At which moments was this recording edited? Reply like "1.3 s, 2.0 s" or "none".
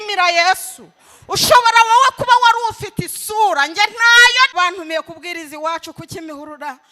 4.5 s